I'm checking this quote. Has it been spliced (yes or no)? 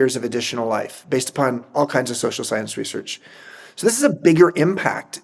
no